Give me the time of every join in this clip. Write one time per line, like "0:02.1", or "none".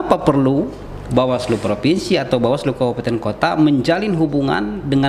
none